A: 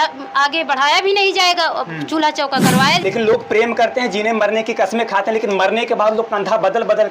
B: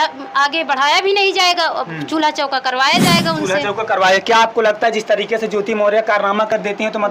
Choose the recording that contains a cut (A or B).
A